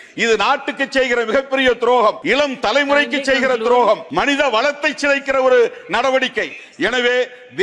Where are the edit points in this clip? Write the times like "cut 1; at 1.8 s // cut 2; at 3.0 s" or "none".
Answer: cut 1; at 2.2 s // cut 2; at 4.1 s